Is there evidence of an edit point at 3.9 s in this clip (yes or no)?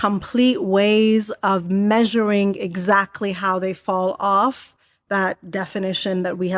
no